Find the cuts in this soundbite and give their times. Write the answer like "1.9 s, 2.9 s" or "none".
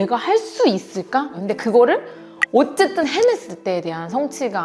1.3 s

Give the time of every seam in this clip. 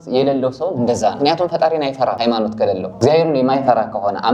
2.5 s

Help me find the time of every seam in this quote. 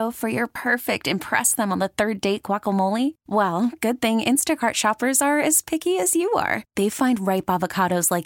none

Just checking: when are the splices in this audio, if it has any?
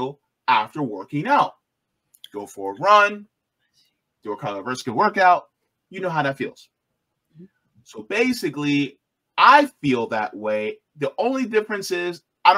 none

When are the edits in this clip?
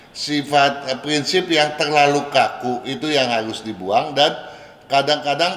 none

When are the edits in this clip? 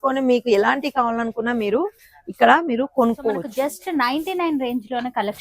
3.5 s

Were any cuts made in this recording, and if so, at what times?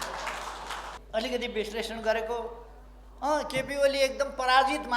0.9 s

